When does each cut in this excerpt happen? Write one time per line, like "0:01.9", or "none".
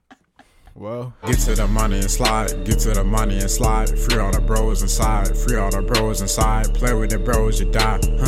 0:01.2